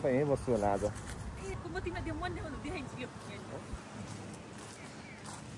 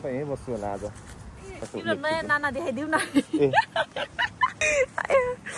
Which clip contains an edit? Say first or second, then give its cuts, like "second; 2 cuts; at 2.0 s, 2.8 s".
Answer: second; 2 cuts; at 1.6 s, 4.6 s